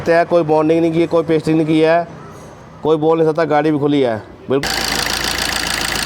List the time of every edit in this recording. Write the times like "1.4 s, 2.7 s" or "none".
4.6 s